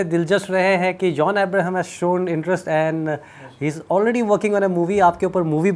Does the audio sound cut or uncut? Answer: uncut